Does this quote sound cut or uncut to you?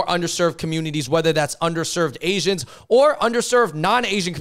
uncut